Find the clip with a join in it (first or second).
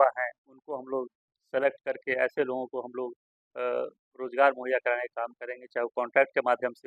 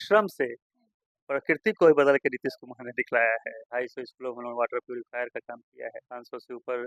second